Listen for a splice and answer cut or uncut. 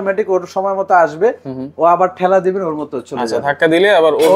uncut